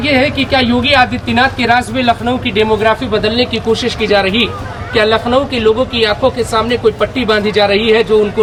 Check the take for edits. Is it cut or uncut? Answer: uncut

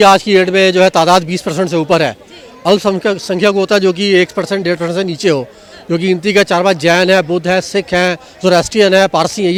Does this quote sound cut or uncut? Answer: uncut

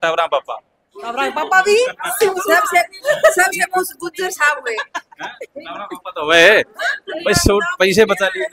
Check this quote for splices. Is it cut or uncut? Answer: uncut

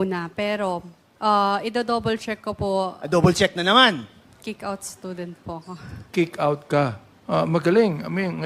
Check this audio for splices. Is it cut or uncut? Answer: cut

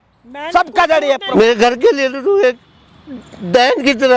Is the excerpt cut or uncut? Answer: cut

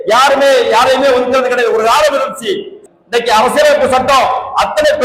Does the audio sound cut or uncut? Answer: cut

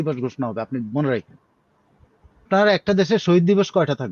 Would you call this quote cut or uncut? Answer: cut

